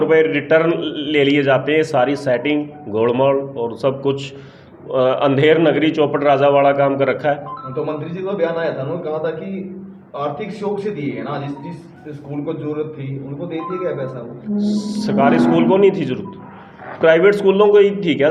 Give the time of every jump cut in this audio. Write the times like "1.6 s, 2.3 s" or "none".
none